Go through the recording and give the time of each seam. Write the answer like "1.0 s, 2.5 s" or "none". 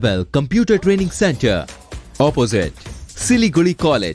none